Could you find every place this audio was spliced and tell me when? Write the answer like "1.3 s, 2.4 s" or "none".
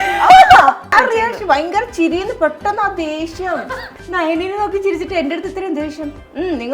0.9 s, 3.9 s